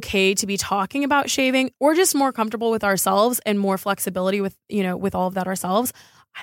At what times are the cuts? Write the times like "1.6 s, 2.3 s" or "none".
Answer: 1.7 s